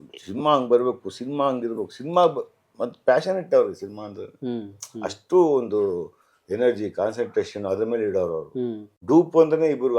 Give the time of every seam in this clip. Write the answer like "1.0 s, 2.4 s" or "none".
8.9 s